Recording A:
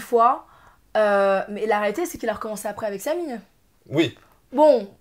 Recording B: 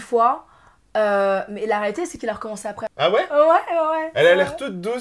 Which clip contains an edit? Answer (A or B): B